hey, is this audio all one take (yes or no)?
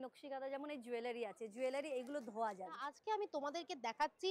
no